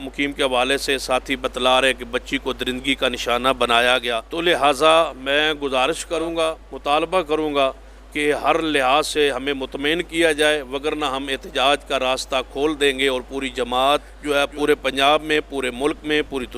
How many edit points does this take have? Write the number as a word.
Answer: three